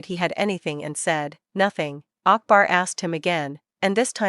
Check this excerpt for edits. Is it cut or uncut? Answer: cut